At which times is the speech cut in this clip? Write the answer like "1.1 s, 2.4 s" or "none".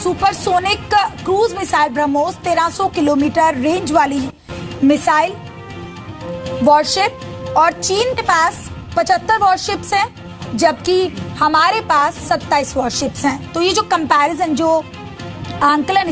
12.7 s